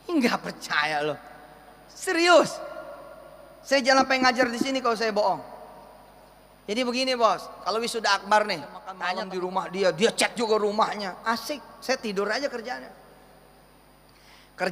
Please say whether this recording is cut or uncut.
cut